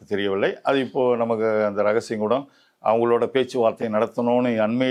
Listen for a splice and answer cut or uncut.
uncut